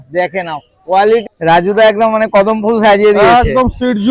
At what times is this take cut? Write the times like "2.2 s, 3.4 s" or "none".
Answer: 1.3 s